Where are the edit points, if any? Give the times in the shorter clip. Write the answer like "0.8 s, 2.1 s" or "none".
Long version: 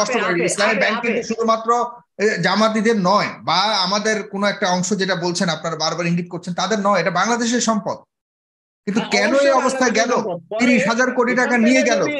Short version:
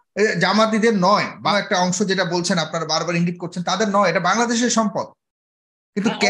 1.5 s